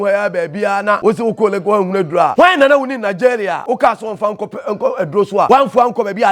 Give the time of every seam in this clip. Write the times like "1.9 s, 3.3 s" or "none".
1.0 s, 2.3 s, 3.6 s, 5.5 s